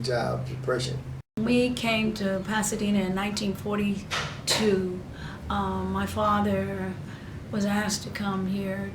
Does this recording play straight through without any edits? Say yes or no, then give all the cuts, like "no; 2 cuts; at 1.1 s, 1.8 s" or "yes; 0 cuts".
no; 1 cut; at 1.2 s